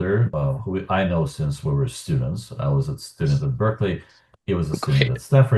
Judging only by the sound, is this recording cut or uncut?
uncut